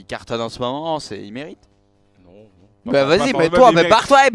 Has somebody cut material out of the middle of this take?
yes; 1 cut; at 2.5 s

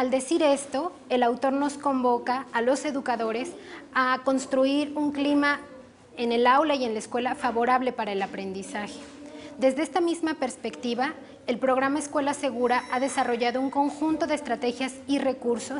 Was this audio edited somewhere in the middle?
yes; 1 cut; at 3.1 s

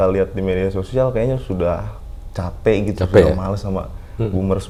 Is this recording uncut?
yes; 0 cuts

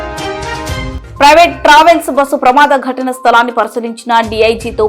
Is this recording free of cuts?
no; 1 cut; at 1.0 s

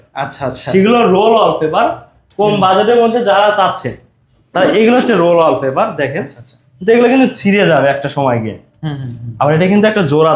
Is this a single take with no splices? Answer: yes; 0 cuts

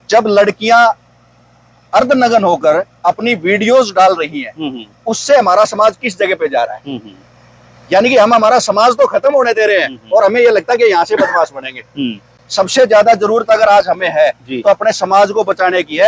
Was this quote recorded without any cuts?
yes; 0 cuts

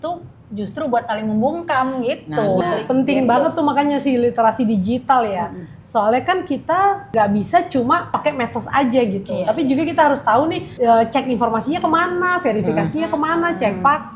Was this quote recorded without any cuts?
no; 4 cuts; at 2.6 s, 7.0 s, 8.2 s, 10.7 s

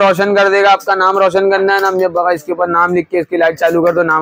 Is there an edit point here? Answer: no; 0 cuts

